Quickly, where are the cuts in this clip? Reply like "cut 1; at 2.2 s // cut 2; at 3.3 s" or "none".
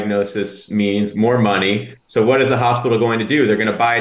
none